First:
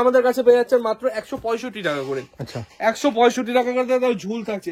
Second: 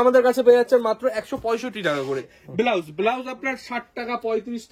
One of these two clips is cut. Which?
second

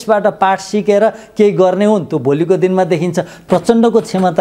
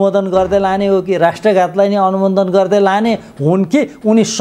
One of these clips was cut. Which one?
first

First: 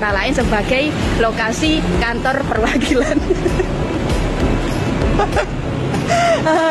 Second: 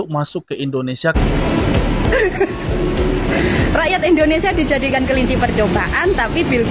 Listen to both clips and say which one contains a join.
second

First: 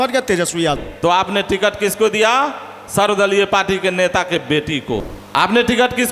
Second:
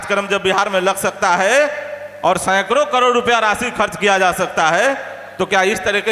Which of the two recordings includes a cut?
first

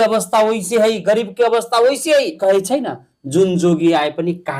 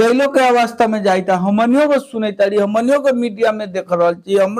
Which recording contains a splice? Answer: first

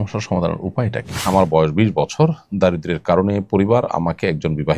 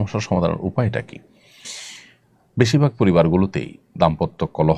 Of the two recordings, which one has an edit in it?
first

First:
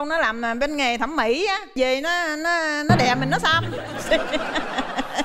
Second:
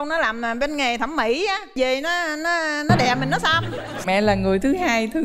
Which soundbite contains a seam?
second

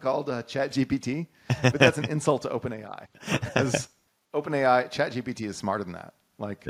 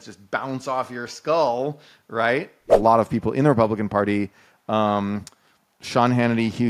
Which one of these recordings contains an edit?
second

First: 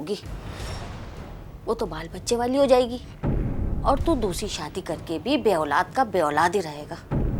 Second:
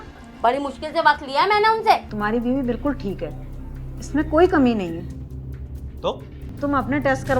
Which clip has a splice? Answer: second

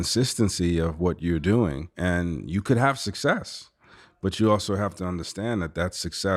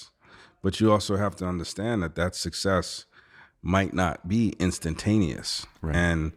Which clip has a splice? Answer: first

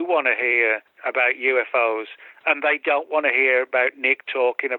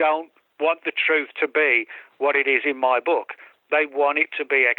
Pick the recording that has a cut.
first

